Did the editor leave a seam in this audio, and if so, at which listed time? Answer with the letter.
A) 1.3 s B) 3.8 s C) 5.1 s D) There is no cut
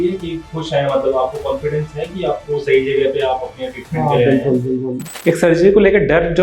C